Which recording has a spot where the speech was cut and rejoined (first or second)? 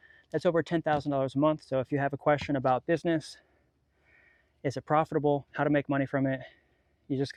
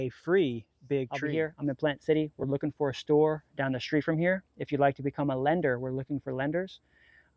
second